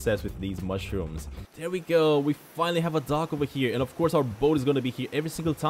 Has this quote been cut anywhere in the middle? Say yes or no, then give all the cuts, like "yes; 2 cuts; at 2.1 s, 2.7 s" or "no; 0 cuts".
yes; 1 cut; at 1.4 s